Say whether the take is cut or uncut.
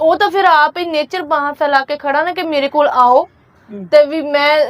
uncut